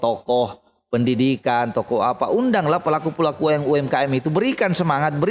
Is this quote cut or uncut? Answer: uncut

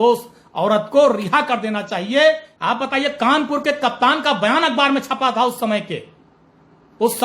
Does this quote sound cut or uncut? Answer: cut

